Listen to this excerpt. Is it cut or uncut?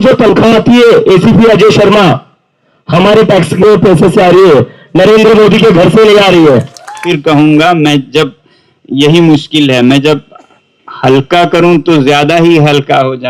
cut